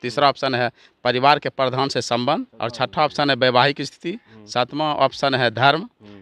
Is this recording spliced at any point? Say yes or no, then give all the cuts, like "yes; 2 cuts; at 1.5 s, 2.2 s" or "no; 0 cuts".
yes; 1 cut; at 2.6 s